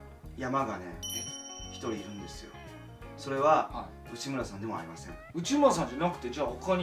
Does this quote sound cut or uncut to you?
uncut